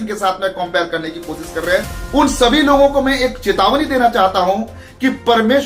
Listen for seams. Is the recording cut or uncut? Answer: cut